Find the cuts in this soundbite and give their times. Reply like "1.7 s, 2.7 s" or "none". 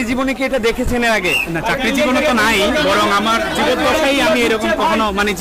none